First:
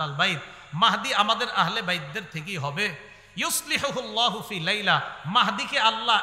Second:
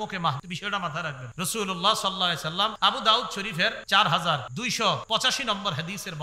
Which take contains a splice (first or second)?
second